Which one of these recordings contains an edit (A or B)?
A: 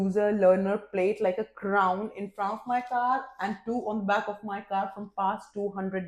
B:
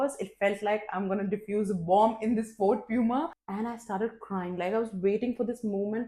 B